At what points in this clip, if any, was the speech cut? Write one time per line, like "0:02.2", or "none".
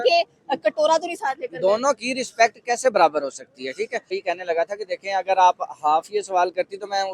0:04.2